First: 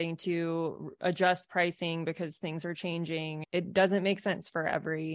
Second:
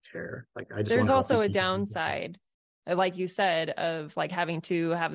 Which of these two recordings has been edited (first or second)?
first